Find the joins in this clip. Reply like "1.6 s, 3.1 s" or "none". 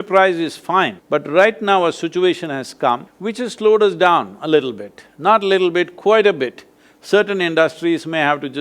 1.0 s, 3.1 s